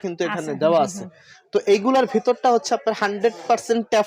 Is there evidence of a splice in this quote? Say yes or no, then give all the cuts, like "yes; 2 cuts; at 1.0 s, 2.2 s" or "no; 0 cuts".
no; 0 cuts